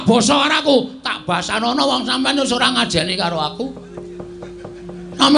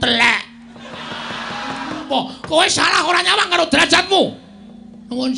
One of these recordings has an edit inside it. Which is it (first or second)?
second